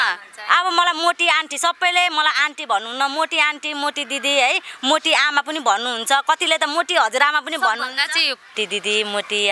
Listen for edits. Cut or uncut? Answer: cut